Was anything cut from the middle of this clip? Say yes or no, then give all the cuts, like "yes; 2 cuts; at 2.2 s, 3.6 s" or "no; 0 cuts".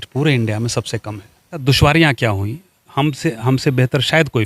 yes; 1 cut; at 1.6 s